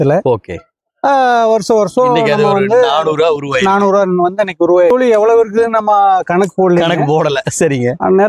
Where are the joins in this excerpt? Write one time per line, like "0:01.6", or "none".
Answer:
0:04.9